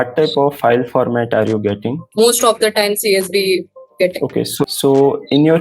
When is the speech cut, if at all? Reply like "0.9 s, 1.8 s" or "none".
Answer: 2.0 s, 3.8 s, 4.6 s